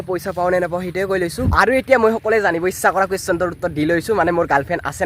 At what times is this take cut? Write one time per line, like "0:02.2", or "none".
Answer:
0:01.4